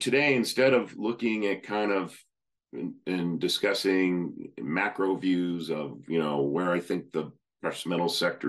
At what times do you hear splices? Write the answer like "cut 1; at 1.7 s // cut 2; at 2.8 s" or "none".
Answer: none

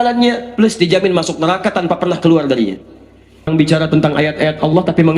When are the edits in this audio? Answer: cut 1; at 3.5 s

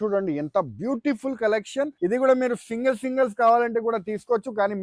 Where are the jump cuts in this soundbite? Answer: cut 1; at 1.9 s

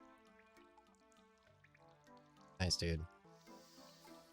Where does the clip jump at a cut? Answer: none

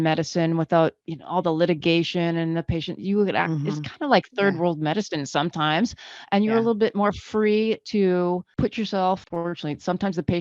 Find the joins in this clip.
cut 1; at 8.5 s // cut 2; at 9.3 s

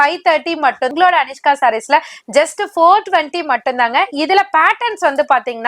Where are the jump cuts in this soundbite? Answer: cut 1; at 0.9 s

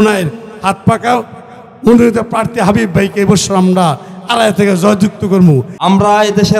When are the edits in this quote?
cut 1; at 5.7 s

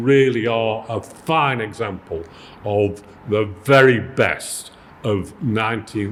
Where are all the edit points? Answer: none

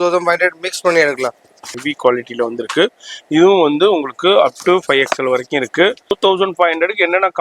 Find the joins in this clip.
cut 1; at 1.7 s // cut 2; at 6.1 s

